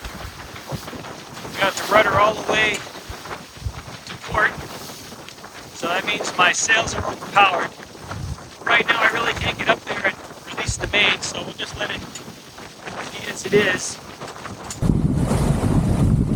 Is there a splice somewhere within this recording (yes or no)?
no